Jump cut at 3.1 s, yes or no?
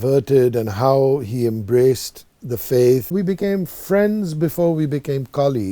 yes